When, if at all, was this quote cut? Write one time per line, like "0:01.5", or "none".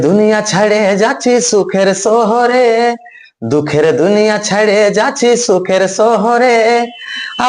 none